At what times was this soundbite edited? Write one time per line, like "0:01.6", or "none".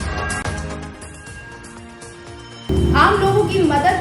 none